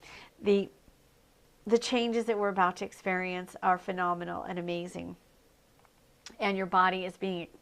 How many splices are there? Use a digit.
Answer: 0